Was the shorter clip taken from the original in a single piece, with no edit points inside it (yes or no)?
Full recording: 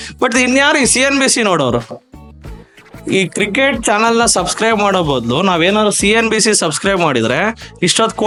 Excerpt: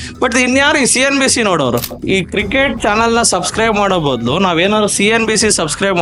no